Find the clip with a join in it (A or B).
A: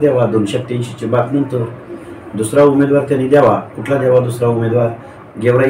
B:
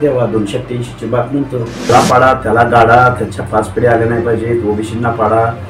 B